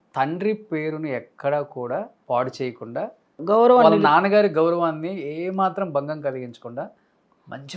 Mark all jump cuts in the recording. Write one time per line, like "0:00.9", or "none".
0:02.2
0:03.4